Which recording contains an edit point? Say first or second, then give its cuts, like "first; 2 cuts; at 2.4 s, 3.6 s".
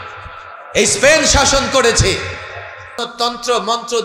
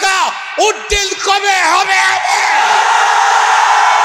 first; 1 cut; at 3.1 s